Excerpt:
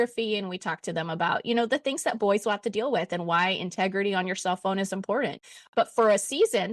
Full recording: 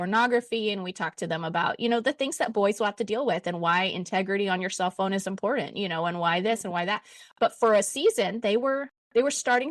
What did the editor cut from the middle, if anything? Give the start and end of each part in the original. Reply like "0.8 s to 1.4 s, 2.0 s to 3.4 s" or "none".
5.7 s to 7.0 s